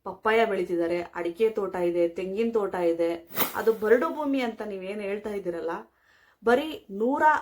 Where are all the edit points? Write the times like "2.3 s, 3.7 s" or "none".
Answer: 3.5 s